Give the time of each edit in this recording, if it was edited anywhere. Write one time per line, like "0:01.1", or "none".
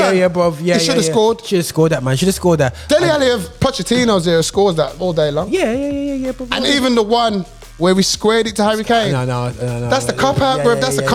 none